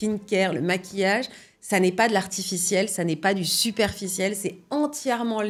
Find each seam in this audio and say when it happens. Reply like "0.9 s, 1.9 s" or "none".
none

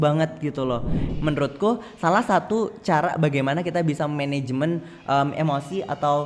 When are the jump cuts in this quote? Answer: 1.1 s

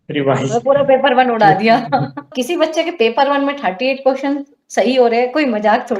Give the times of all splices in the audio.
2.3 s

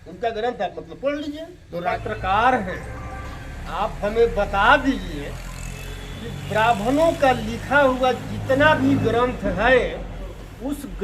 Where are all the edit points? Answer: 1.9 s

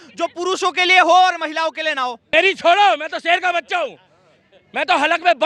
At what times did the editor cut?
2.2 s

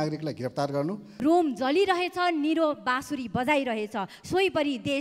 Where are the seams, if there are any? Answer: 1.1 s

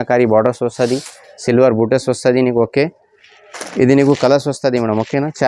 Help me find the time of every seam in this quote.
none

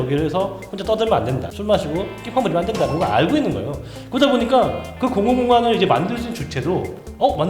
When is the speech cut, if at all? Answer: 1.5 s

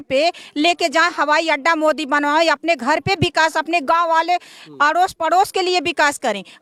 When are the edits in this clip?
none

